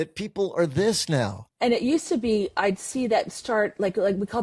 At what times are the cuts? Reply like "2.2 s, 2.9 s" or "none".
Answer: 1.4 s